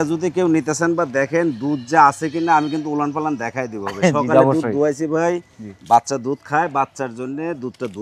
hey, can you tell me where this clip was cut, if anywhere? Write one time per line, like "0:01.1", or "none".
none